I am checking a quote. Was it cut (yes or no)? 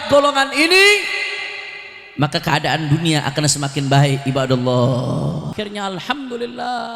yes